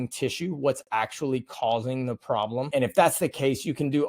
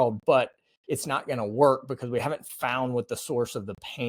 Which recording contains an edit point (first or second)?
first